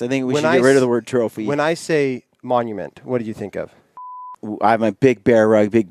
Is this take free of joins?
no; 1 cut; at 4.4 s

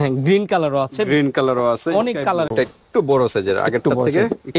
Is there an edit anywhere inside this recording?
yes; 1 cut; at 2.5 s

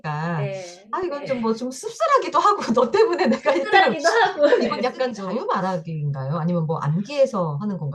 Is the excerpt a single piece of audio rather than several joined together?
no; 1 cut; at 5.2 s

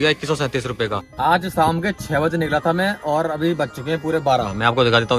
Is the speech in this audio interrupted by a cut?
yes; 1 cut; at 1.1 s

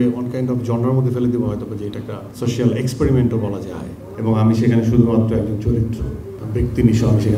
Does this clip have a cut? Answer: yes; 1 cut; at 4.0 s

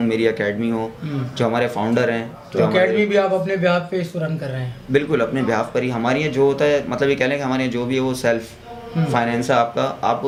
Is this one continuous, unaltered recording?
yes; 0 cuts

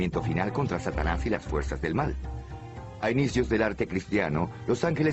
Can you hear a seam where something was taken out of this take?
no; 0 cuts

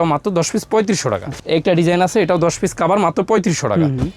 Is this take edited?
no; 0 cuts

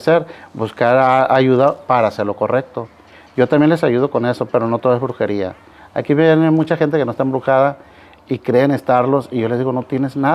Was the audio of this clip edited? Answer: no; 0 cuts

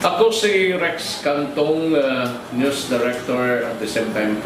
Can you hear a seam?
no; 0 cuts

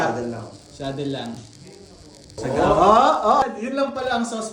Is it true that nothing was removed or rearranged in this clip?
no; 2 cuts; at 2.3 s, 3.4 s

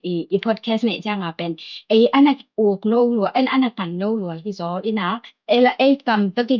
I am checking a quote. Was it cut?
yes; 1 cut; at 5.3 s

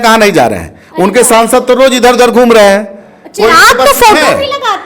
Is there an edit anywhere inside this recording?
no; 0 cuts

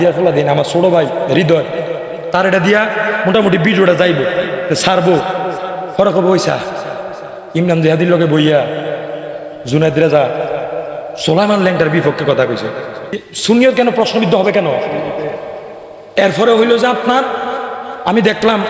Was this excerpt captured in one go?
no; 1 cut; at 13.3 s

